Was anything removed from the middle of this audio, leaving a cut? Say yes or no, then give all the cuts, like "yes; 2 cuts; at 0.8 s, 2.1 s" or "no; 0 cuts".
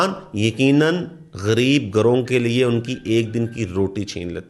no; 0 cuts